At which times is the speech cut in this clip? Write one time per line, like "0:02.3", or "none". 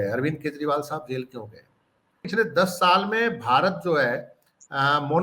0:02.2

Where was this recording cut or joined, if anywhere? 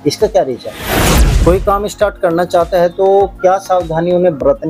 0:01.2

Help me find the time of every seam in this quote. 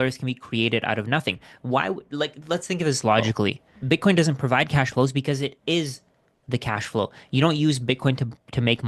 0:03.7

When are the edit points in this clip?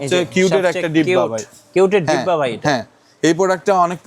none

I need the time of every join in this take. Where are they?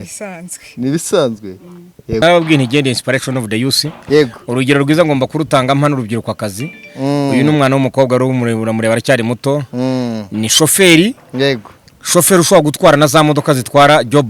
0:02.2

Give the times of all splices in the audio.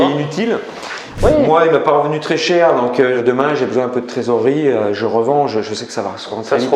0:01.1
0:03.2

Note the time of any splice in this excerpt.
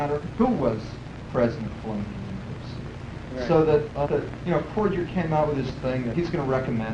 0:05.1

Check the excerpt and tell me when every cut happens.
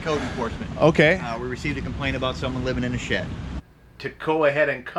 0:03.5

